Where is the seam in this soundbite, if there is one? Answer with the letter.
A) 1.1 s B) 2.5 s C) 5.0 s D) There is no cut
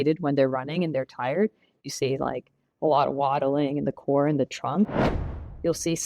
C